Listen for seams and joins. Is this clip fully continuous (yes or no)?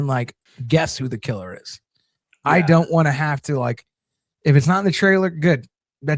yes